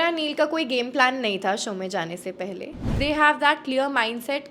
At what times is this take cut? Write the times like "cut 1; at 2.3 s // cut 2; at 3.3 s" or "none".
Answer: cut 1; at 2.9 s